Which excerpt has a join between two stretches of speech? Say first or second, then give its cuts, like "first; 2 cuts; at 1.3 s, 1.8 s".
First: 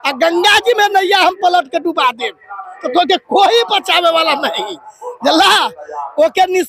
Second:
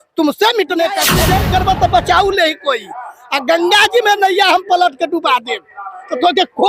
second; 1 cut; at 1.1 s